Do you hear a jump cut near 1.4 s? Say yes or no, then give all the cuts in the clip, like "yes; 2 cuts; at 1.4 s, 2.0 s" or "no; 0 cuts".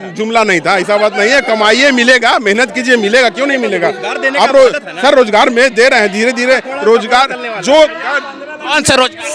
no; 0 cuts